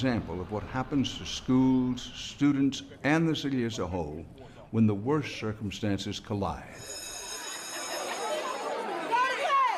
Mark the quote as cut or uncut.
cut